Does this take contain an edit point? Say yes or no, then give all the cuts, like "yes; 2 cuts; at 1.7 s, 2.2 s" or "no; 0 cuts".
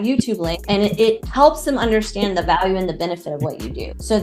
no; 0 cuts